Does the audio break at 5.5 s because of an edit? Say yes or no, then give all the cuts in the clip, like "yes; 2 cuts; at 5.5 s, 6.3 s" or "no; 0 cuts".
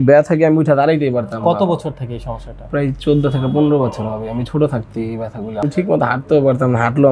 yes; 1 cut; at 5.5 s